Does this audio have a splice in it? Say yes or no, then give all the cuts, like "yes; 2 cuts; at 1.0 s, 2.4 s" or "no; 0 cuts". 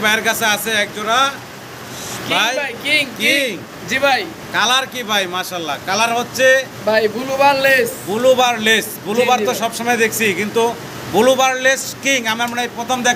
no; 0 cuts